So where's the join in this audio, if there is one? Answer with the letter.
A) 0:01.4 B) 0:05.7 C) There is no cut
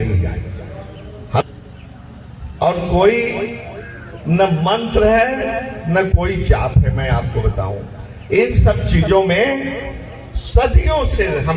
A